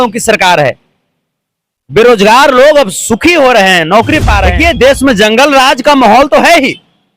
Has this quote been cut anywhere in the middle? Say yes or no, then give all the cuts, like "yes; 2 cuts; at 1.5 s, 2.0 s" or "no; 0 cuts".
yes; 1 cut; at 4.5 s